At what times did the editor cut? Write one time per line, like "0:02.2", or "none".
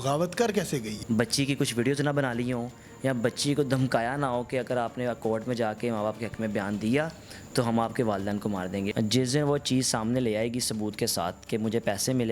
0:00.9
0:08.9